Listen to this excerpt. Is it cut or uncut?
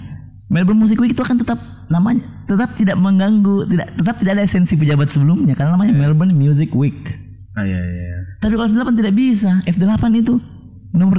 uncut